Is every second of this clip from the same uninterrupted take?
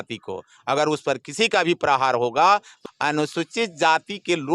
no; 1 cut; at 2.7 s

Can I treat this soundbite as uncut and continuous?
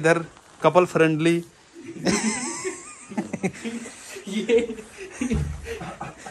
yes; 0 cuts

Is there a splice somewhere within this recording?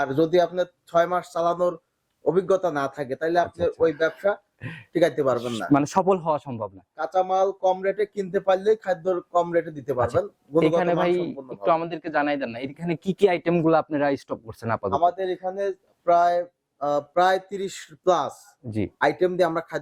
no; 0 cuts

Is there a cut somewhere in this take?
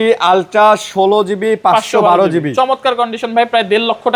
no; 0 cuts

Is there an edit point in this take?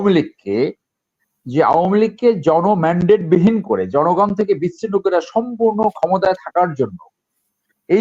no; 0 cuts

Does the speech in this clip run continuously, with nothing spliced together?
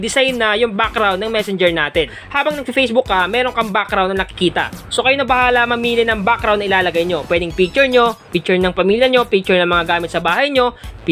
no; 2 cuts; at 2.2 s, 4.8 s

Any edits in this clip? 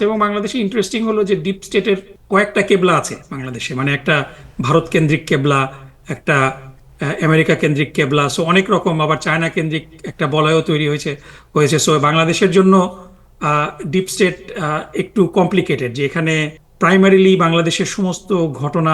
yes; 2 cuts; at 2.1 s, 16.6 s

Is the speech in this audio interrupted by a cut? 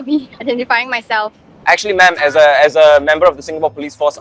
yes; 1 cut; at 1.4 s

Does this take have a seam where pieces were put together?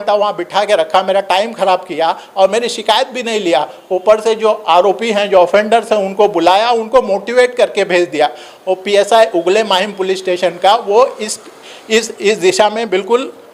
no; 0 cuts

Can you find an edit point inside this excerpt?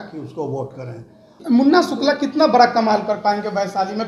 yes; 1 cut; at 1.4 s

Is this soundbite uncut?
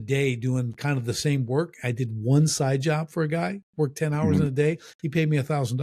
yes; 0 cuts

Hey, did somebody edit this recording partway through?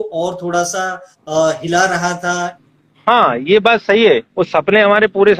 yes; 2 cuts; at 2.6 s, 4.3 s

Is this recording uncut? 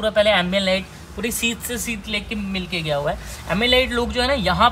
yes; 0 cuts

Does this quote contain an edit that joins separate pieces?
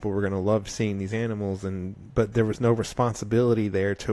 no; 0 cuts

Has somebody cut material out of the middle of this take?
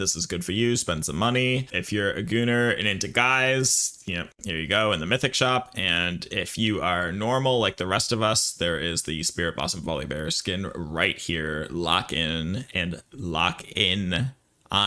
yes; 1 cut; at 1.8 s

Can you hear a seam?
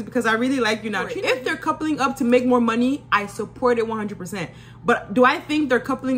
yes; 1 cut; at 1.2 s

